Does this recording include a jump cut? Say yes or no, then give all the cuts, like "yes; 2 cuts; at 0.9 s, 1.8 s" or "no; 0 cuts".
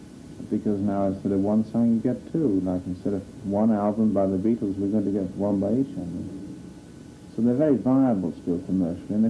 yes; 1 cut; at 8.0 s